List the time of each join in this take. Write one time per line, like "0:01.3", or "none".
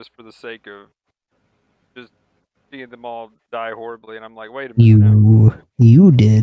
none